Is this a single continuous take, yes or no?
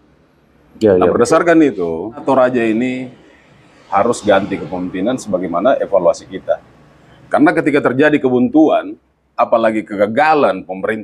no